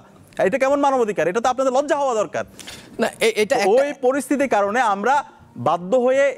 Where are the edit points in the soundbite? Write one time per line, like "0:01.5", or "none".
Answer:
none